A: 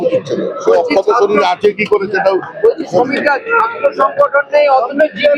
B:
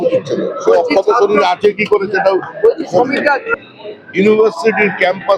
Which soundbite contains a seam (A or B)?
B